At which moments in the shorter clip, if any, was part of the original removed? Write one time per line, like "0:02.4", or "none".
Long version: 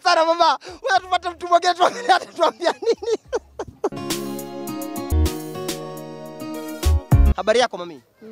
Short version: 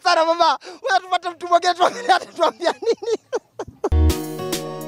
0:03.9